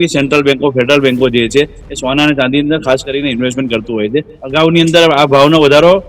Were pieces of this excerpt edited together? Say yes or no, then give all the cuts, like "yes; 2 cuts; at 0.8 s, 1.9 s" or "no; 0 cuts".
yes; 1 cut; at 4.4 s